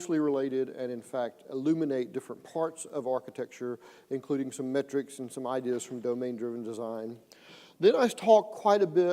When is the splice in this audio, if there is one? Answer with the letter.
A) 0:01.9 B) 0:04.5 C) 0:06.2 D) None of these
A